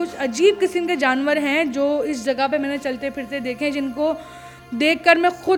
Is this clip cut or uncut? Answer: uncut